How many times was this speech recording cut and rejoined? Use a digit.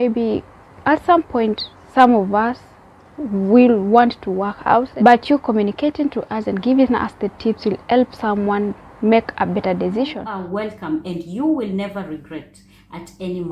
2